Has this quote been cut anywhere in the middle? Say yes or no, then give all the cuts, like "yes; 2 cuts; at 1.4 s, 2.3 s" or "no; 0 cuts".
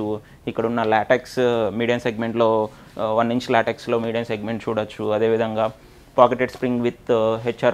no; 0 cuts